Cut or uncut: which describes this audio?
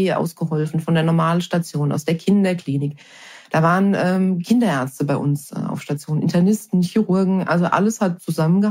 uncut